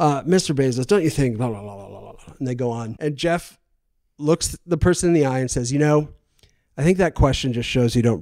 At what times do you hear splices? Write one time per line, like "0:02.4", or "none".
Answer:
0:02.9

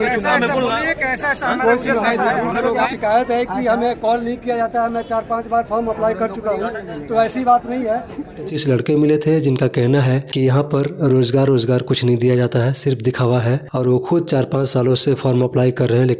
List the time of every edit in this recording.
0:02.9
0:08.6

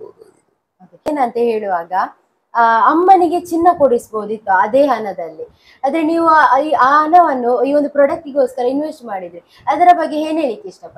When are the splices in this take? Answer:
0:01.1

